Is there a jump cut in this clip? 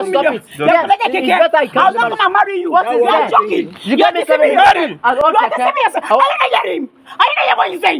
no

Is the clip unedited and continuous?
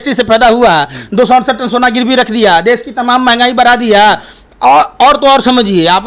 yes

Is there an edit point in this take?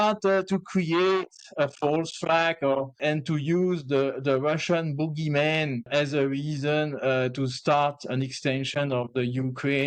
yes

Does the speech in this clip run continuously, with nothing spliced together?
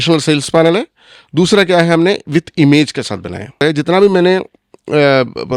no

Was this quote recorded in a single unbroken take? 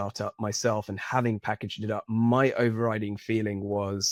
yes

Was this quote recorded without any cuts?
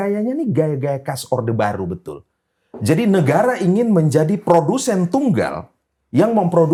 yes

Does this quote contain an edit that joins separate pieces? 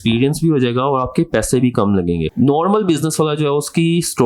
yes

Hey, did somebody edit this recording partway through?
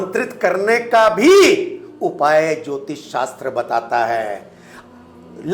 no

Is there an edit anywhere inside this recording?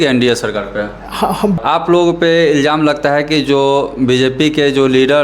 yes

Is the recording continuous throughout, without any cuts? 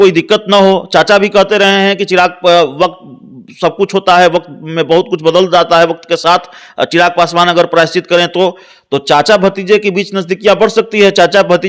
yes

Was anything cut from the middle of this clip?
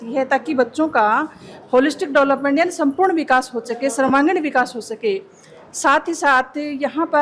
no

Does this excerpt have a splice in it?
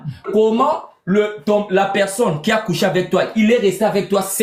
no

